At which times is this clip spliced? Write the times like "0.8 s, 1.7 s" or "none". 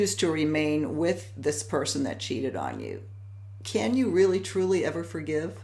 none